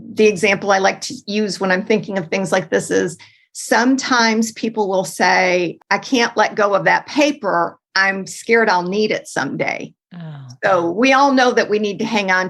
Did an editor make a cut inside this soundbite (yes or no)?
yes